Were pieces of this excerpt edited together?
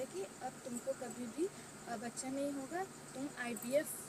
no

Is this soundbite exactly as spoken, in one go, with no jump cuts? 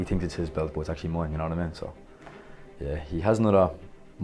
yes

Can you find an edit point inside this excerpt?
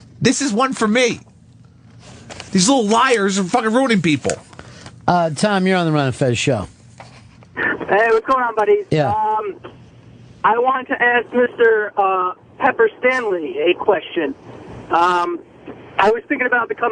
no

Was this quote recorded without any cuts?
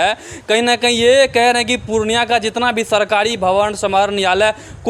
yes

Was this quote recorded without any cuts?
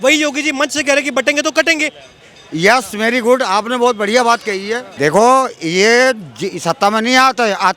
no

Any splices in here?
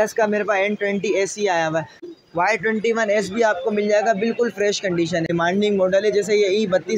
yes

